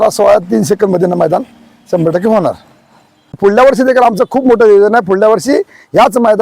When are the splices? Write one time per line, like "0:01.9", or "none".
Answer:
0:03.3